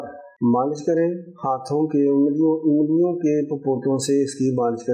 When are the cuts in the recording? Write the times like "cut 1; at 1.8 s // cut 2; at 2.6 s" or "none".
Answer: none